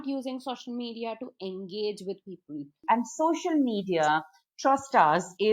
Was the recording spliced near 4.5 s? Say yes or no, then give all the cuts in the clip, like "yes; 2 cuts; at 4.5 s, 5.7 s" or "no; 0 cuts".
no; 1 cut; at 2.8 s